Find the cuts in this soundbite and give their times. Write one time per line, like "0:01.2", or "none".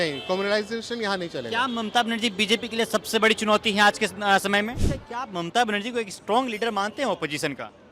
0:04.9